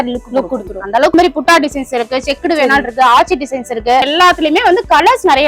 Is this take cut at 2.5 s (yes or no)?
no